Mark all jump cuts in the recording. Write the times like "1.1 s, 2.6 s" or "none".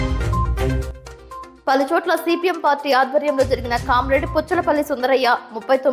1.0 s